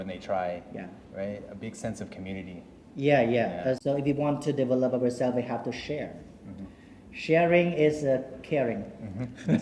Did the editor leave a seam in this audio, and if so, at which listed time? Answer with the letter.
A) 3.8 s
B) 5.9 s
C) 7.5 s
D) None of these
A